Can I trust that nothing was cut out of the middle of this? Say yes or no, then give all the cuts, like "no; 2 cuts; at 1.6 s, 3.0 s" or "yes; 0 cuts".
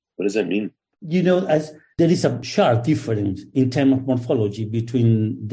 no; 2 cuts; at 0.9 s, 2.4 s